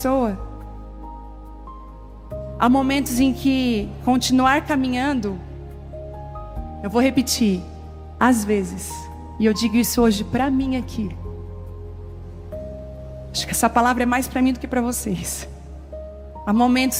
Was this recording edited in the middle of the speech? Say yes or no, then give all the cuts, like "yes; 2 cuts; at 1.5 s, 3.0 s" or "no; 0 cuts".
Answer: no; 0 cuts